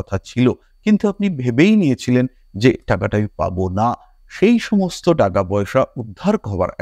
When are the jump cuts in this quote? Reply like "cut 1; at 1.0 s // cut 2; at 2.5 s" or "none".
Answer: none